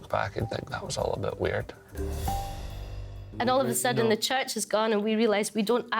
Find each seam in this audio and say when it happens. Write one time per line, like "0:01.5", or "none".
0:01.9
0:03.2